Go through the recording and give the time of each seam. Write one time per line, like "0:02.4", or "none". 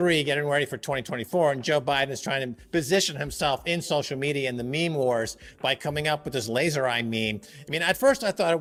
none